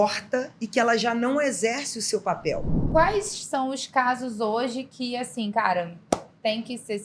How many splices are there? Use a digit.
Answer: 1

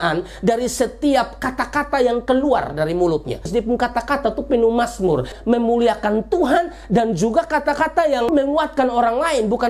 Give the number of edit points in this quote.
2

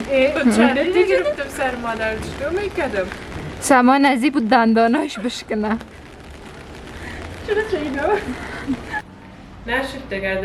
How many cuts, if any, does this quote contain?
1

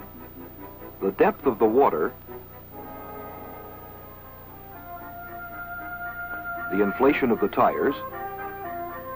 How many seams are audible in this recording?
1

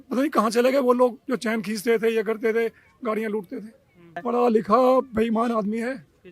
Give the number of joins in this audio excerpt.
1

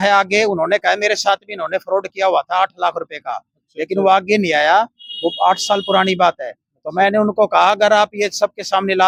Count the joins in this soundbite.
0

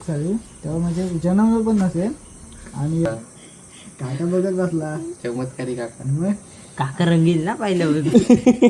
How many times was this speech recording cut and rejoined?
1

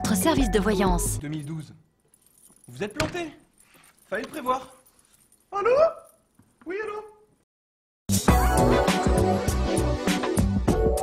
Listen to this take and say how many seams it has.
1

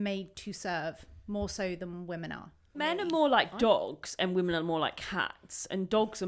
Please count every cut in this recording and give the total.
1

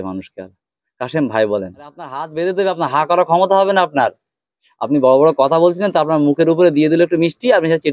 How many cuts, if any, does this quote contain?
1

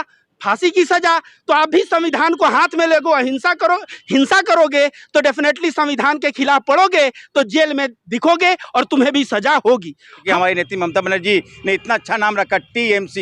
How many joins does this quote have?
1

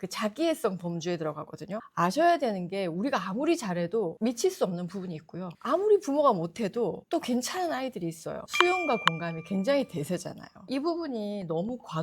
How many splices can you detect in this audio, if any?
1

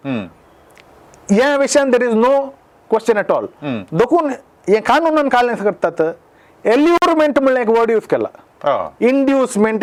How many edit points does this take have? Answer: 0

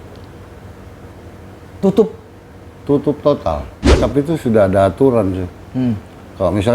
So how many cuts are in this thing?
1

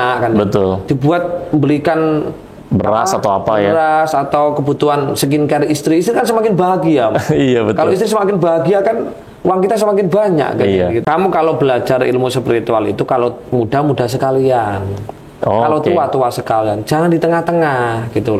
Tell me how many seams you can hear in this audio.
1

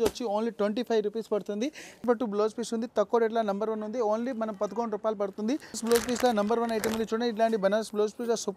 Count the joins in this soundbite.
2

